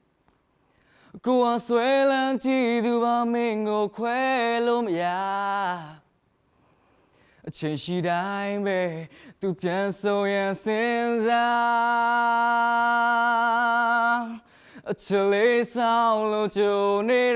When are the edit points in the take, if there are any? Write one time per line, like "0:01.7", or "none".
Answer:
0:06.7